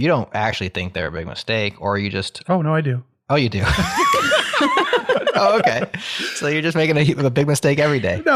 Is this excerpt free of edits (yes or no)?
yes